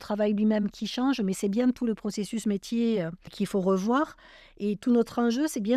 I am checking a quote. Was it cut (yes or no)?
yes